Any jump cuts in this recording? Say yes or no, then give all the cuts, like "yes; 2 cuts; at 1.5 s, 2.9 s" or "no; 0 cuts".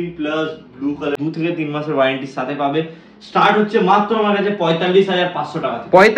yes; 1 cut; at 1.1 s